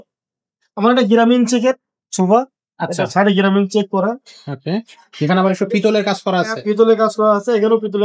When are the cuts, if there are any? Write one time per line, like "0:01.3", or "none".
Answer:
none